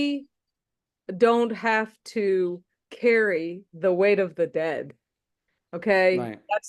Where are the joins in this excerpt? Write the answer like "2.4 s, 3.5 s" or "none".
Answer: none